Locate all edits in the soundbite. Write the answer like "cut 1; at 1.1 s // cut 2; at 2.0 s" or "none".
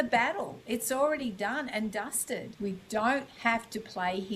cut 1; at 2.5 s

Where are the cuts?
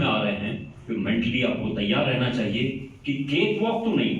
none

